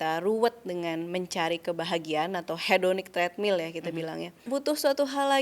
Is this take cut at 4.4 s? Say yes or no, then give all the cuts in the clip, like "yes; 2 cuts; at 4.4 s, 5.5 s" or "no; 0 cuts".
yes; 1 cut; at 4.4 s